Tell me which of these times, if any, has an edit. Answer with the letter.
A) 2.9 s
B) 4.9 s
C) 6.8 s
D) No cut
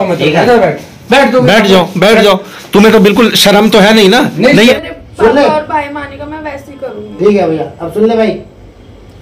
B